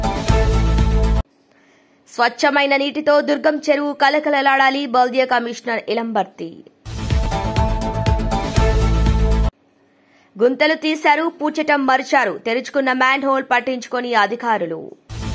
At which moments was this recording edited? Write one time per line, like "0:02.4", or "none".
0:01.0